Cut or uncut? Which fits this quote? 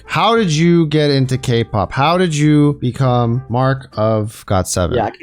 cut